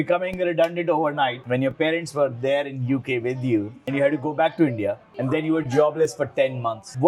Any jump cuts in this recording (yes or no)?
no